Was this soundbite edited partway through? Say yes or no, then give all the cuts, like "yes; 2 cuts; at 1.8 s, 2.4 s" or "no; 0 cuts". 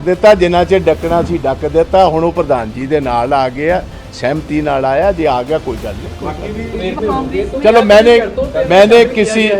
yes; 1 cut; at 6.8 s